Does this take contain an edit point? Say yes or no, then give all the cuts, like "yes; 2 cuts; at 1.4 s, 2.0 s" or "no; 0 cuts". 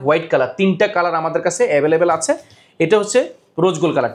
no; 0 cuts